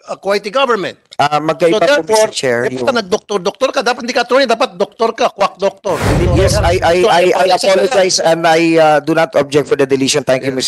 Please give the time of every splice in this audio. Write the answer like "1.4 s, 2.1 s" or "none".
6.3 s